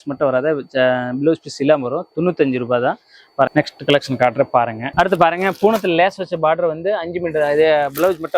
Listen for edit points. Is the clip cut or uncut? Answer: cut